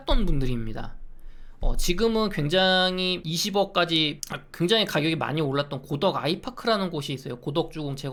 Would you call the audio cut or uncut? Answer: uncut